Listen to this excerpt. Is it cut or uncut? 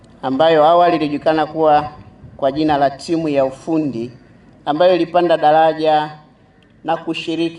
uncut